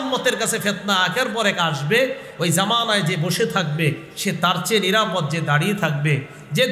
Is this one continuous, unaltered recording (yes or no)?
yes